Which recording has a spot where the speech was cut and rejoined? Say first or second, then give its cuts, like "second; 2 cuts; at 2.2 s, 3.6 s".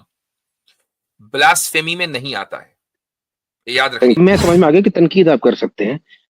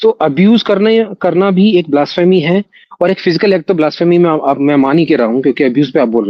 first; 1 cut; at 4.2 s